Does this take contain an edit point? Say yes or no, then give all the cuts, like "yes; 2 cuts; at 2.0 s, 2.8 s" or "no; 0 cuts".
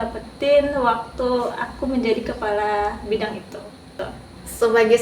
yes; 1 cut; at 3.9 s